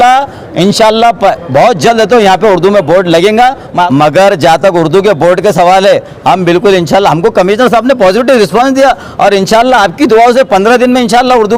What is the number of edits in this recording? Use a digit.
1